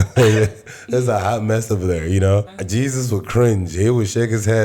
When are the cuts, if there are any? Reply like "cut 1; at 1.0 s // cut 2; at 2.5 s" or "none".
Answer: cut 1; at 2.6 s